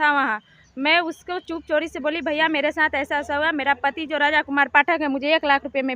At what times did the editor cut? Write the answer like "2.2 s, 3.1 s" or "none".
none